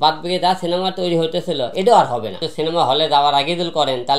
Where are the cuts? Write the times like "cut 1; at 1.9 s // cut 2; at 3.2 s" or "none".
none